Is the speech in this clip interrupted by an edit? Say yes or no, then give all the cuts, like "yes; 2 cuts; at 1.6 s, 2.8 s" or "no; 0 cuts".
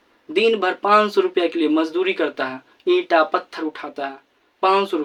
no; 0 cuts